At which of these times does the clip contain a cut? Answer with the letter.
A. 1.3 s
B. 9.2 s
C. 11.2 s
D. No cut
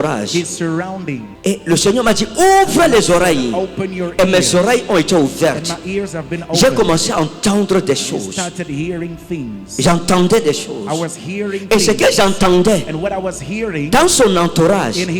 A